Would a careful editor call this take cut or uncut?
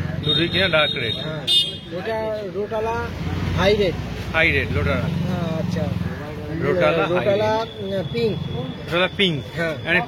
uncut